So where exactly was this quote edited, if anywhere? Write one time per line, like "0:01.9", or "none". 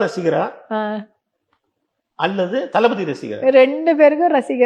none